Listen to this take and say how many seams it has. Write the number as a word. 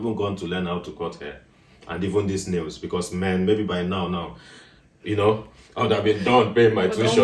zero